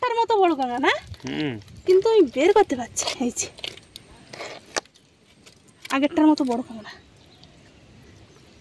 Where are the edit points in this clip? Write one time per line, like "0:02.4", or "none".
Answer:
none

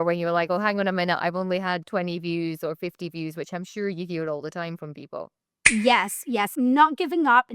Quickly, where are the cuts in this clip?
0:06.5

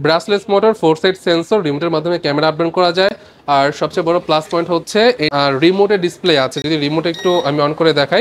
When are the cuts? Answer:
none

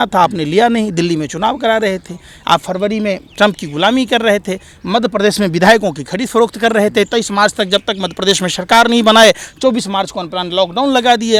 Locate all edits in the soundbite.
none

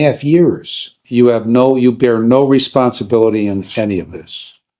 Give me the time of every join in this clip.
0:01.0

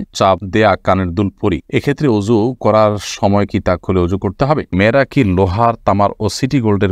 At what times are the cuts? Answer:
0:04.7

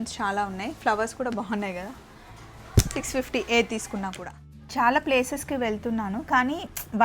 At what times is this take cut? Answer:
0:04.6

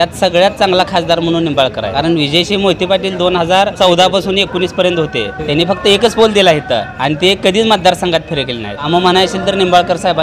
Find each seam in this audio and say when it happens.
0:01.9
0:03.7
0:05.4
0:06.9
0:08.9

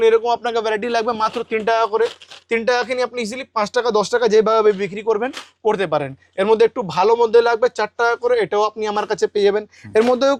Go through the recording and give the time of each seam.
none

